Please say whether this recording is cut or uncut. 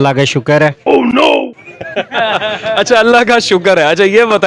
uncut